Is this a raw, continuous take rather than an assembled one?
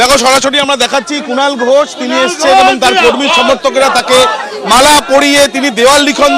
yes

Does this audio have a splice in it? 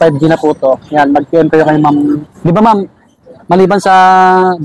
yes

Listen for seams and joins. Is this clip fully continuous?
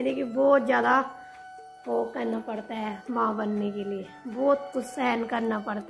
yes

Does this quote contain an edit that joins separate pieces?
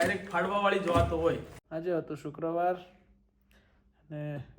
yes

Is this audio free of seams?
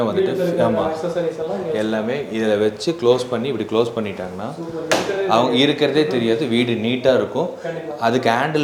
yes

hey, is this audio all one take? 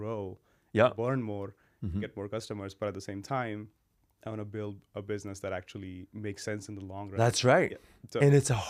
yes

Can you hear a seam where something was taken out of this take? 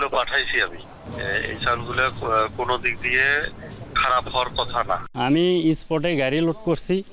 yes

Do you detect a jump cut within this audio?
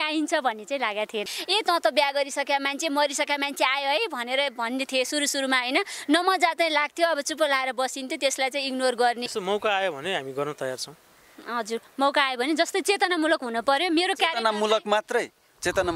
yes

